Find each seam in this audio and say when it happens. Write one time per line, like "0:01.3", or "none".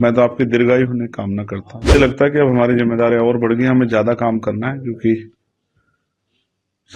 0:02.0